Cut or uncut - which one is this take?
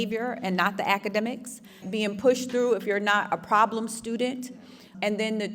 cut